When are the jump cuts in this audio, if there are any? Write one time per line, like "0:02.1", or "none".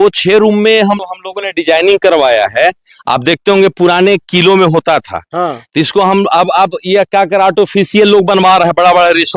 0:01.0